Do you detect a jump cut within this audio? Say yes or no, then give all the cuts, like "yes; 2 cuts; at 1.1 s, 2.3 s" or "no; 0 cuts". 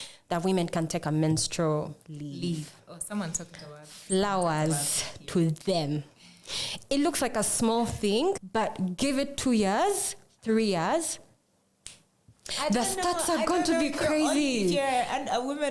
no; 0 cuts